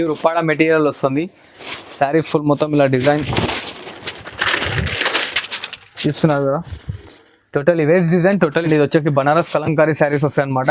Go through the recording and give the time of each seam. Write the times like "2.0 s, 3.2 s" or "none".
8.7 s